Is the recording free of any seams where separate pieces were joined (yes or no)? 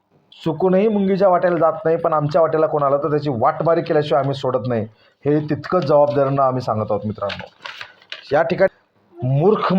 no